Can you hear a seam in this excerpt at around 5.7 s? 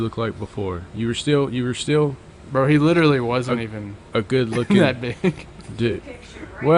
no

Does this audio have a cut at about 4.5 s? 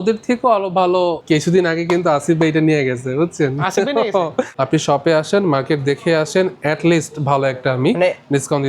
yes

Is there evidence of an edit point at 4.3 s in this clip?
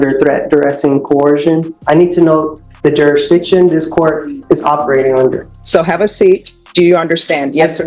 no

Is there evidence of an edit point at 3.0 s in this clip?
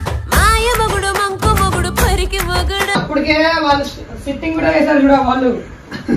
yes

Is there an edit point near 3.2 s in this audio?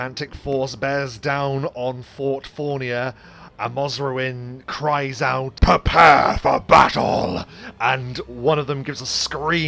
no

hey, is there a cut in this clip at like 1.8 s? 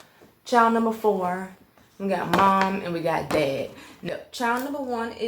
no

